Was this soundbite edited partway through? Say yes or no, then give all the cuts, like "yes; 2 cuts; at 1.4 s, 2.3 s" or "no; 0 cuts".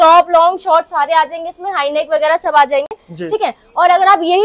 no; 0 cuts